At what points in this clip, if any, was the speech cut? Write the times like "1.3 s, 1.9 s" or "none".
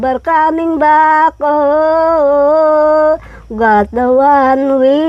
none